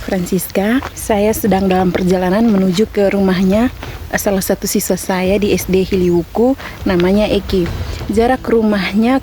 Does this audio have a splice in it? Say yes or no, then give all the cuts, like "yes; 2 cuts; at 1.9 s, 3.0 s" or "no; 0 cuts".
yes; 1 cut; at 0.9 s